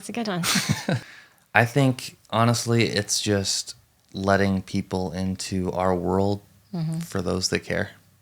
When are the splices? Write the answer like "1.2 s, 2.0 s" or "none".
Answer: 1.0 s